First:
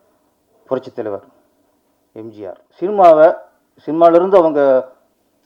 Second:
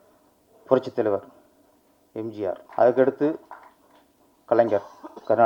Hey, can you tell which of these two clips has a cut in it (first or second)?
first